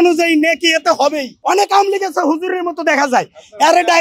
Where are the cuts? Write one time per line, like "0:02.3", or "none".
0:01.3